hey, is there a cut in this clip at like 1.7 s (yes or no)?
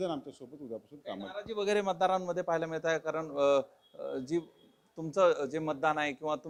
no